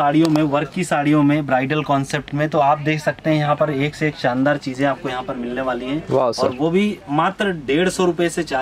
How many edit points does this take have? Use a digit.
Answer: 0